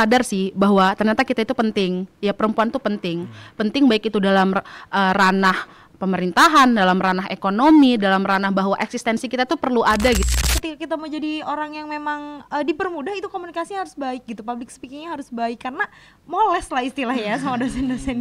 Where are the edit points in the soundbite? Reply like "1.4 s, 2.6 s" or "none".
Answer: 10.3 s